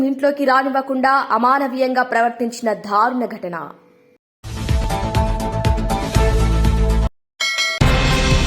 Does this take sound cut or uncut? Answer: cut